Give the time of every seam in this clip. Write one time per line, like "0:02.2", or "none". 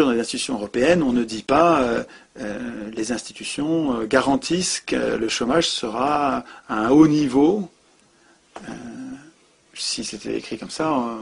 0:01.9